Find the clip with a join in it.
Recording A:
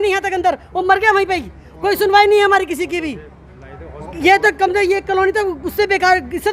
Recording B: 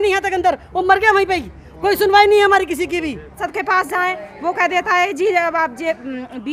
B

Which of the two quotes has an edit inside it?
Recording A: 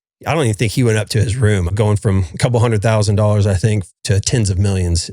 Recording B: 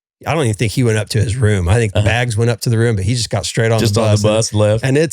A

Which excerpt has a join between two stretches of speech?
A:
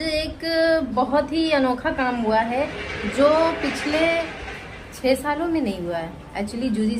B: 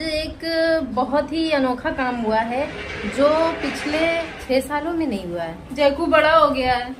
B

